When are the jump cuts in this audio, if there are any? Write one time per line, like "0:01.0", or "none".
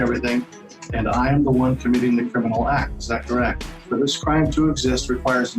0:03.6